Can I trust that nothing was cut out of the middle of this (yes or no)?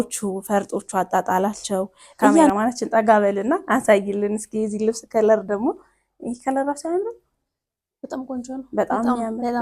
no